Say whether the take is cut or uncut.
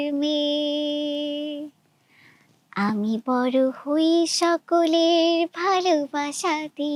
uncut